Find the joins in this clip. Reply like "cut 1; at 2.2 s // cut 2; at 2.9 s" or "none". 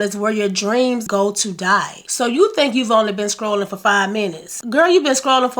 cut 1; at 1.0 s // cut 2; at 2.0 s

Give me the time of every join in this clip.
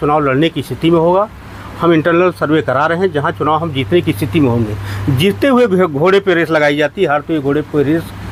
none

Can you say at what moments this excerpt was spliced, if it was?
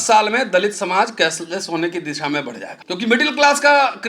cut 1; at 2.7 s

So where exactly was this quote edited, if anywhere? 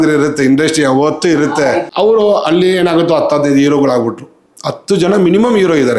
cut 1; at 1.9 s

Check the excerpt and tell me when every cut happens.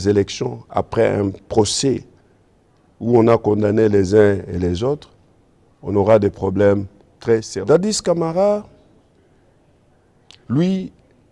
cut 1; at 7.5 s

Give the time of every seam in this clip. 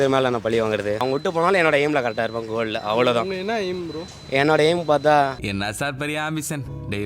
cut 1; at 1.0 s

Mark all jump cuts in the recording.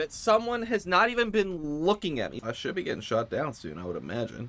cut 1; at 2.3 s

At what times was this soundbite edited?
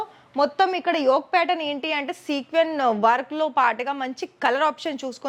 none

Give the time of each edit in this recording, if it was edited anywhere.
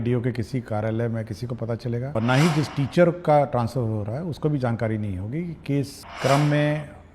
cut 1; at 2.1 s // cut 2; at 6.0 s

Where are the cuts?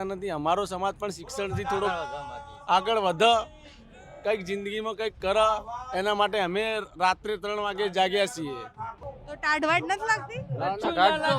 cut 1; at 9.0 s

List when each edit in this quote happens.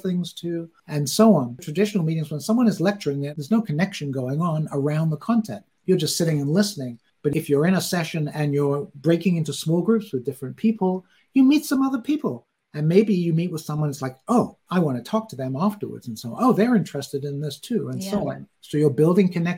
cut 1; at 1.7 s // cut 2; at 3.3 s

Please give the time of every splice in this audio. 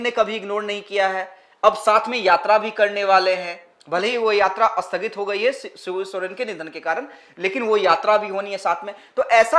none

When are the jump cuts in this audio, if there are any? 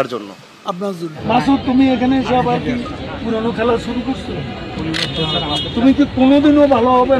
cut 1; at 1.1 s

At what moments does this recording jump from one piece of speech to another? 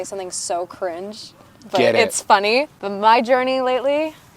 cut 1; at 2.8 s

